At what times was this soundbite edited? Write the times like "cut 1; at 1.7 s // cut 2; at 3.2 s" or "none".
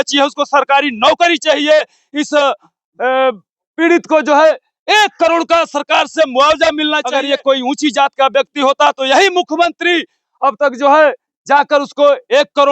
cut 1; at 7.1 s